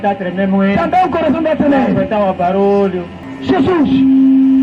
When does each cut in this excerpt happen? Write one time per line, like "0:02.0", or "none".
0:03.1